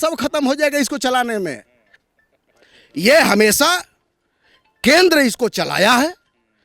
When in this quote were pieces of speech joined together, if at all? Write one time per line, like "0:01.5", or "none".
none